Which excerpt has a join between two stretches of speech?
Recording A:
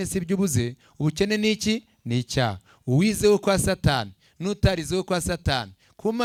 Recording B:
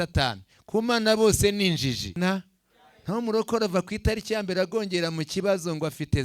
B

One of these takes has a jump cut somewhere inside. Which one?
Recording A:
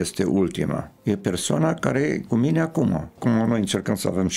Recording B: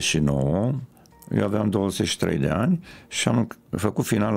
A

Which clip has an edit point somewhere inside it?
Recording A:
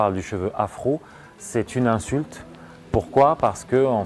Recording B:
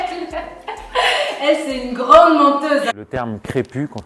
B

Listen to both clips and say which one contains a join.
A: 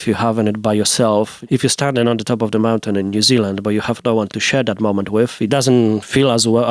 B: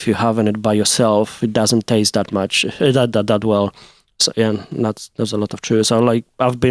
A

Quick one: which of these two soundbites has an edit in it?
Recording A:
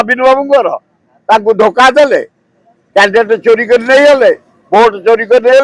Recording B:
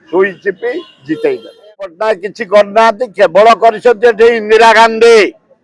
B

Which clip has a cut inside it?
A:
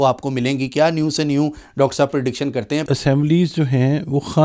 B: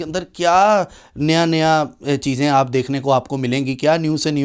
A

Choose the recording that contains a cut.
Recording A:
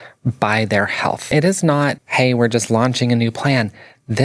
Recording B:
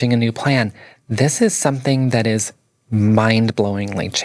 A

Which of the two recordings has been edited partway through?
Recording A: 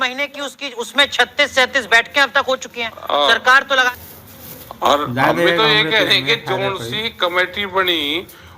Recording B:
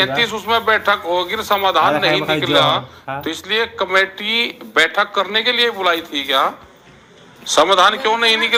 A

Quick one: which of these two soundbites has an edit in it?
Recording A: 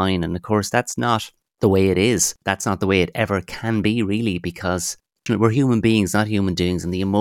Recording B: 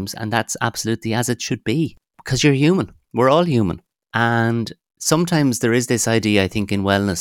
A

